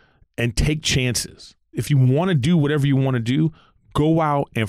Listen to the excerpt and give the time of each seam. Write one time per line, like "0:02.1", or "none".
0:01.8